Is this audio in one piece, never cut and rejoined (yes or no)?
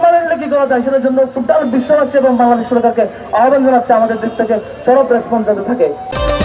yes